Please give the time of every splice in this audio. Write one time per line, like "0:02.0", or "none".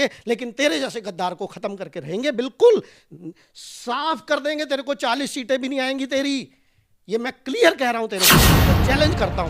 0:08.5